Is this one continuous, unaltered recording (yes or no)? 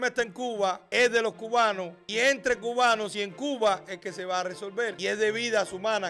no